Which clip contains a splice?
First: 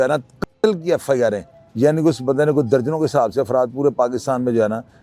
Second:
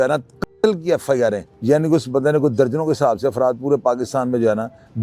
second; 1 cut; at 1.5 s

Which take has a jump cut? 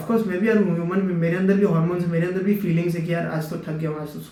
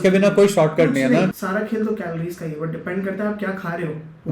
second; 1 cut; at 1.3 s

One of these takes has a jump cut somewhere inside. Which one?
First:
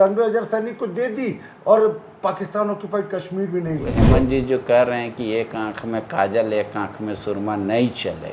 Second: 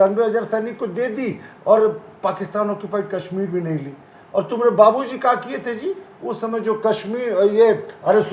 first; 1 cut; at 3.9 s

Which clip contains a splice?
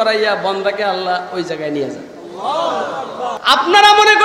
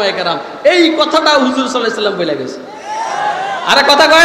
first; 1 cut; at 3.3 s

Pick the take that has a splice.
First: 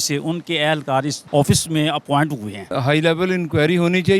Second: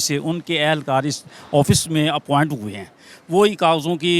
first; 2 cuts; at 1.2 s, 2.7 s

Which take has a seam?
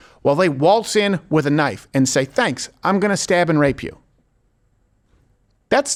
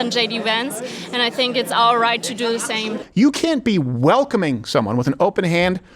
second; 1 cut; at 3.0 s

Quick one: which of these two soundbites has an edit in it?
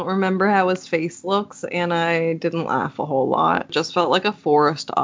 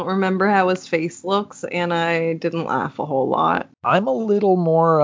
first; 1 cut; at 3.7 s

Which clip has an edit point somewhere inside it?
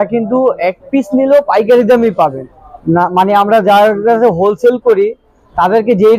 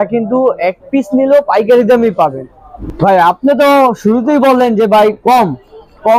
second; 1 cut; at 2.8 s

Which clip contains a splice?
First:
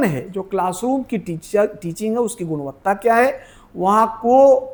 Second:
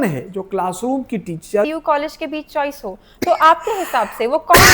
second; 1 cut; at 1.7 s

